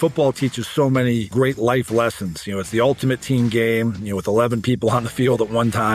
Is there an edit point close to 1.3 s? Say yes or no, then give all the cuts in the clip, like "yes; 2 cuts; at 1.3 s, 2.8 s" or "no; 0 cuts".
yes; 1 cut; at 1.3 s